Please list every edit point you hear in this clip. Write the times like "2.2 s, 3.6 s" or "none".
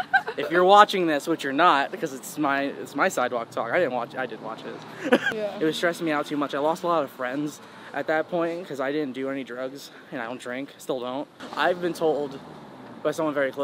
5.2 s, 11.4 s